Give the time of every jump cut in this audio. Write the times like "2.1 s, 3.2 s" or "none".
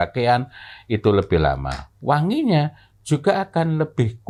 none